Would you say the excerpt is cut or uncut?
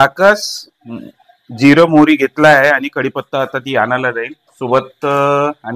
uncut